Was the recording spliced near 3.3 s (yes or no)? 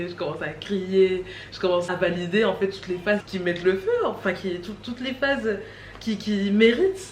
yes